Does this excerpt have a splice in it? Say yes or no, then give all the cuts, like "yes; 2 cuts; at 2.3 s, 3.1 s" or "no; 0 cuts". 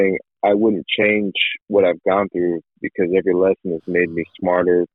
no; 0 cuts